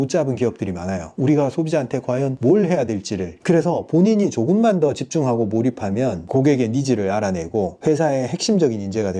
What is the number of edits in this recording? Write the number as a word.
five